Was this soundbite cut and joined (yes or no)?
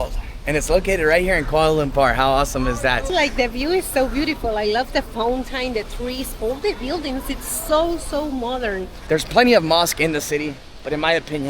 yes